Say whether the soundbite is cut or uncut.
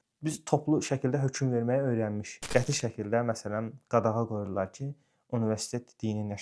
cut